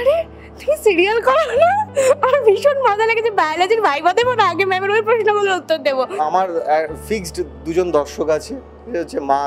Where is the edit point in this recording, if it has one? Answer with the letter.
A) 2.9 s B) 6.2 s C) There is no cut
B